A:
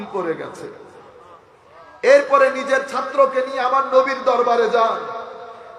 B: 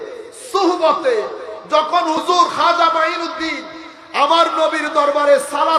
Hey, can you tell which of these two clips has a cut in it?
B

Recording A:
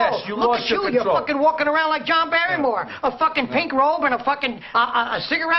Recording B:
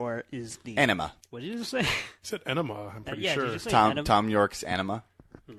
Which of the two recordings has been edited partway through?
B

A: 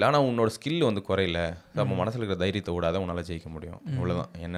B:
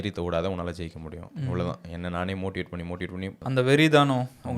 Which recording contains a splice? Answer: B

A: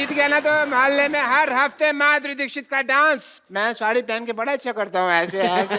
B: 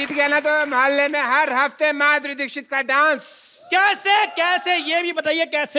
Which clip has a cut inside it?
A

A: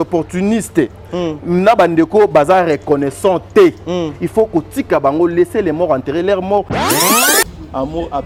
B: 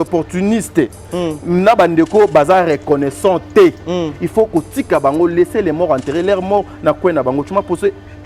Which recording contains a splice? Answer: B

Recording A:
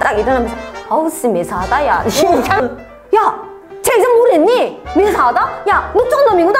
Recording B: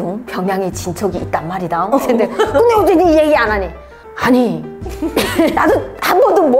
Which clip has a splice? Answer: A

